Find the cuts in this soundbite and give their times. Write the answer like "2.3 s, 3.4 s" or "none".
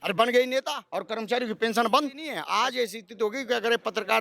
2.4 s